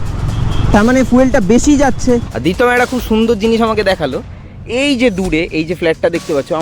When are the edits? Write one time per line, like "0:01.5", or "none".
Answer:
0:02.3